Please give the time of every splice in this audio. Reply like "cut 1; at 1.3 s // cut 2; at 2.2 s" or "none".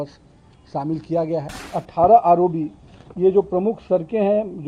cut 1; at 1.6 s